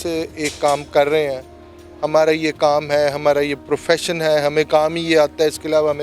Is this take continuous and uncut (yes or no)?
yes